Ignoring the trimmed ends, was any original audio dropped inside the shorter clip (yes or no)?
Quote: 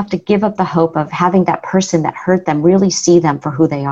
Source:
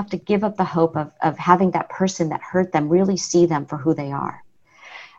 yes